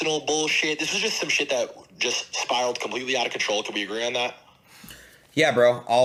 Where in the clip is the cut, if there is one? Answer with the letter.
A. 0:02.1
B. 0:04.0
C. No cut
C